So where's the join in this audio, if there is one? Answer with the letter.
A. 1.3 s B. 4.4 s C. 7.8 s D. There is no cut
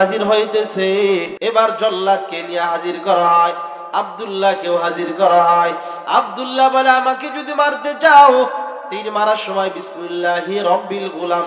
A